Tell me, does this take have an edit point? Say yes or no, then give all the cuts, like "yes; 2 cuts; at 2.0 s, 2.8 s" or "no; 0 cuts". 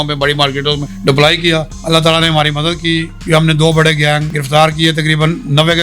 yes; 4 cuts; at 0.9 s, 1.7 s, 3.1 s, 4.3 s